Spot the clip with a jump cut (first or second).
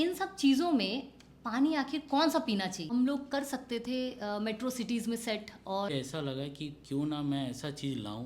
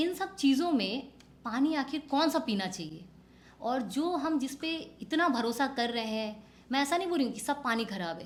first